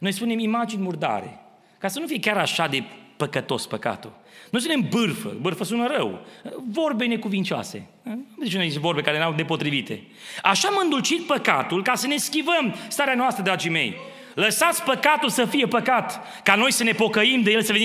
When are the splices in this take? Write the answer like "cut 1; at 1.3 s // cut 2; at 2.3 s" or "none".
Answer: none